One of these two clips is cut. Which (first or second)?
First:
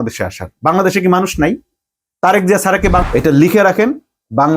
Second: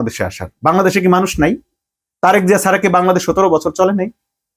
first